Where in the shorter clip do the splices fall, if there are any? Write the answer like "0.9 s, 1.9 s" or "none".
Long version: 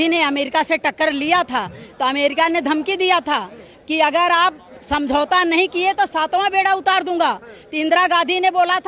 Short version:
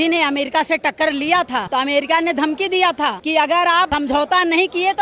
1.7 s, 3.2 s, 3.9 s